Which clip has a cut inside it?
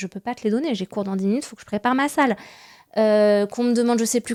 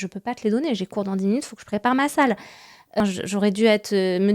second; 1 cut; at 3.0 s

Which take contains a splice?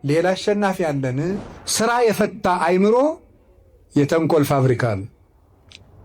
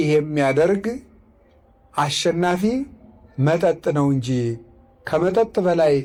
first; 1 cut; at 1.5 s

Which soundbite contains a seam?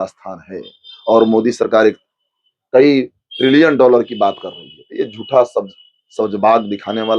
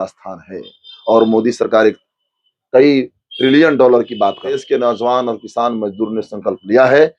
second; 1 cut; at 4.6 s

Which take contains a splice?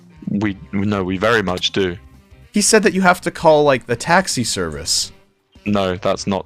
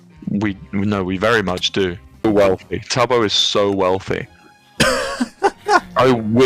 second; 1 cut; at 2.2 s

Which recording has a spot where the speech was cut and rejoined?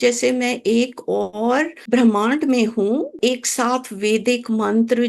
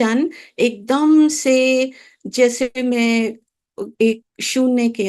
first; 2 cuts; at 1.8 s, 3.2 s

